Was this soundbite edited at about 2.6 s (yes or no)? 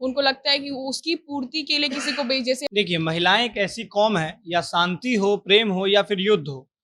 yes